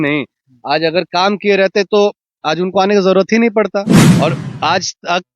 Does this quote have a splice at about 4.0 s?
yes; 1 cut; at 4.0 s

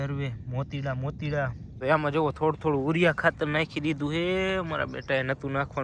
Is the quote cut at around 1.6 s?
yes; 1 cut; at 1.6 s

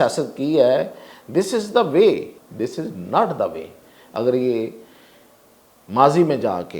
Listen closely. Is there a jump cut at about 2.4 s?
yes; 1 cut; at 2.4 s

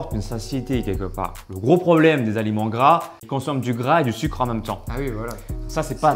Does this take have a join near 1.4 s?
yes; 2 cuts; at 1.4 s, 3.2 s

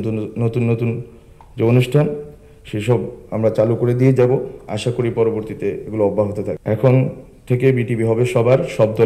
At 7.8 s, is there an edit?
no; 1 cut; at 6.6 s

